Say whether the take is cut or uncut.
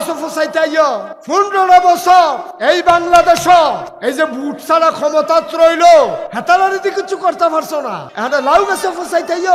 cut